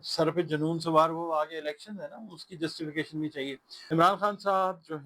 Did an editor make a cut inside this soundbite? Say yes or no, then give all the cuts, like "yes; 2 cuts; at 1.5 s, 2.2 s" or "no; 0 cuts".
yes; 1 cut; at 3.7 s